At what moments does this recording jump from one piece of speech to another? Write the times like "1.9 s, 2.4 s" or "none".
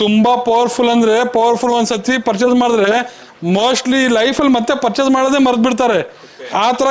none